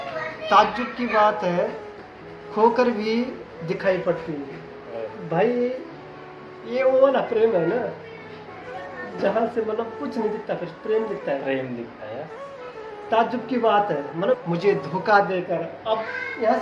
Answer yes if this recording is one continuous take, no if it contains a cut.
no